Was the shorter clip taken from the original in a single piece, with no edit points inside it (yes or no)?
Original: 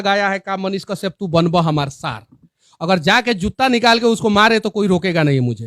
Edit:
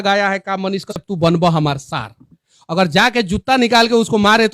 no